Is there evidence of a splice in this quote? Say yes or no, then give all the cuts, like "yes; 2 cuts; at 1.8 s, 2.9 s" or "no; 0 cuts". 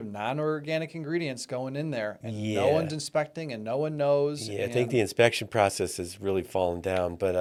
no; 0 cuts